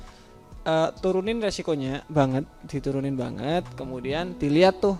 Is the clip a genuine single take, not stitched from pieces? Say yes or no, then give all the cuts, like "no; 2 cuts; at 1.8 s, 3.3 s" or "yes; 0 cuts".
yes; 0 cuts